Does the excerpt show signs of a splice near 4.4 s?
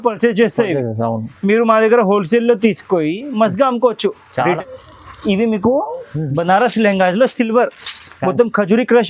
yes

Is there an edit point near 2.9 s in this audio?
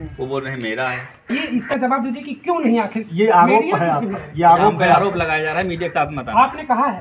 no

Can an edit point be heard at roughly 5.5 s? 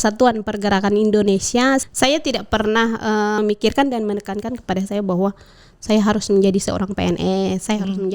no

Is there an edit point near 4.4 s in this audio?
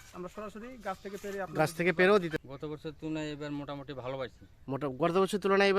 no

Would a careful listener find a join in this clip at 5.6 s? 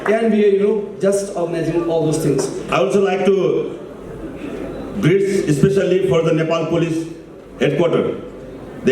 no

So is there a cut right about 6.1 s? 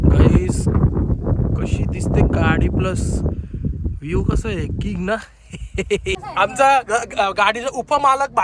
yes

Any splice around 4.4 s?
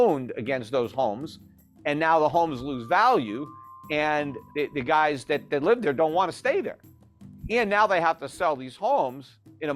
yes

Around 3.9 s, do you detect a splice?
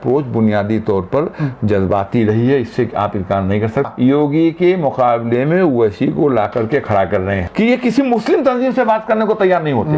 yes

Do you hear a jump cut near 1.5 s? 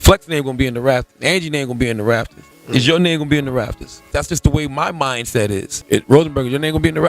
no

